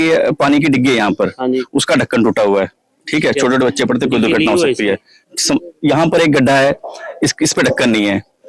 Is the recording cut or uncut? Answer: uncut